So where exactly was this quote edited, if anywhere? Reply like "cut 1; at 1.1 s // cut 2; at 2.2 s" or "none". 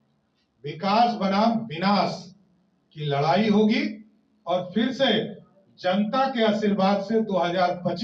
none